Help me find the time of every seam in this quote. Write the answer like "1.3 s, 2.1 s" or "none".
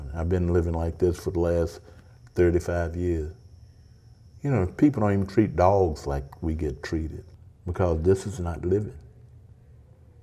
7.2 s